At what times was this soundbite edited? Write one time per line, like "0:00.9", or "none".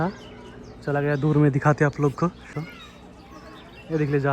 0:02.5